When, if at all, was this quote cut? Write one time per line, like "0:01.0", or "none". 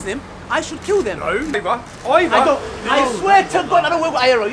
0:01.6